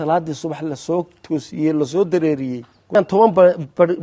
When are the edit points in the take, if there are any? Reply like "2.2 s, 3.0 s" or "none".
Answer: 2.9 s